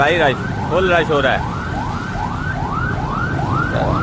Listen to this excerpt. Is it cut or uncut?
uncut